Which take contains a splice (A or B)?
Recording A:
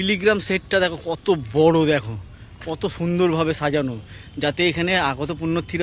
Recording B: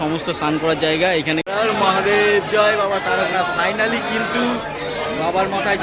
B